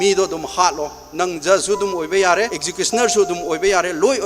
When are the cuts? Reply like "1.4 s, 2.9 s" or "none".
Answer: 2.6 s